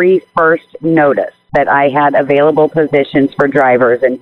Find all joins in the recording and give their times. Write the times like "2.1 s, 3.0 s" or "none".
1.4 s

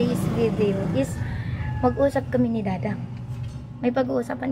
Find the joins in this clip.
none

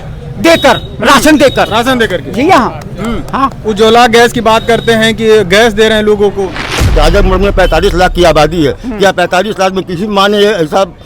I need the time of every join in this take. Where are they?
6.9 s

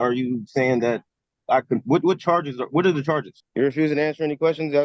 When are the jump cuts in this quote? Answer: 3.4 s

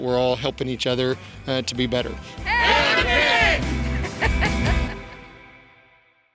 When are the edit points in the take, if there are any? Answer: none

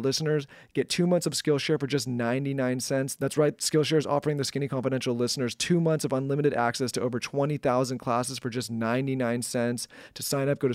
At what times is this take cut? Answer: none

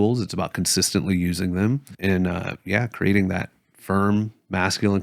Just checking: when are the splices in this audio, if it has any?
1.9 s

